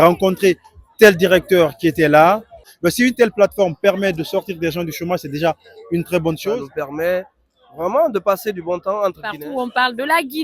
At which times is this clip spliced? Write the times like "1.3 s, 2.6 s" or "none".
2.6 s, 6.7 s, 9.3 s

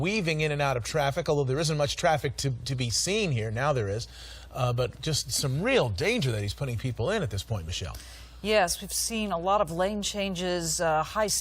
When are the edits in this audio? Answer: 5.6 s

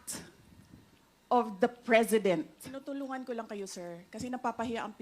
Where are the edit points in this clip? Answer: 2.7 s

